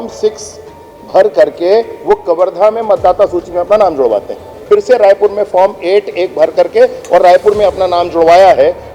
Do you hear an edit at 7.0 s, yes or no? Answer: no